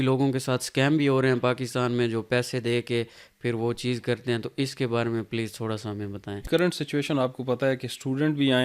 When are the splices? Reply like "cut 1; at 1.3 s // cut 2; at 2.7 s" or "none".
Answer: cut 1; at 6.4 s